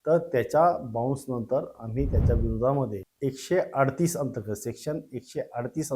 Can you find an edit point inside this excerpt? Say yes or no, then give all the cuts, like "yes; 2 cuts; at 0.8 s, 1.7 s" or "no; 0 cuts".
yes; 1 cut; at 3.0 s